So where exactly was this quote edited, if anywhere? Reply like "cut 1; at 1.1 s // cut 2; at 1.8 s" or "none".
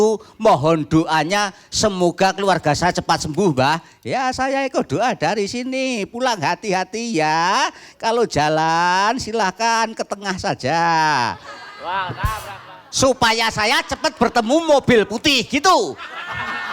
cut 1; at 12.6 s